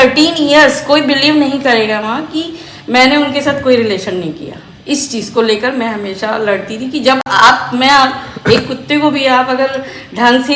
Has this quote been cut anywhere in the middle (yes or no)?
no